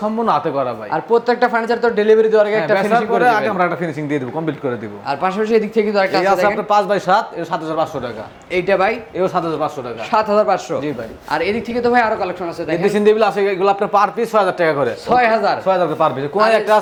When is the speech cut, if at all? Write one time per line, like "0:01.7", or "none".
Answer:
none